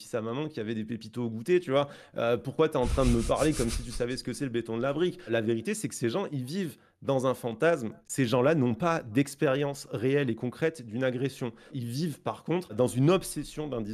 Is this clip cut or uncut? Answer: cut